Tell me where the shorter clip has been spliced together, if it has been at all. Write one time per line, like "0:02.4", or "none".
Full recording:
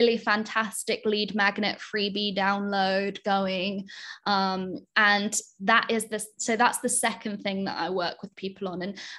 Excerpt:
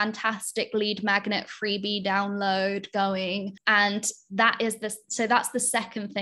0:03.6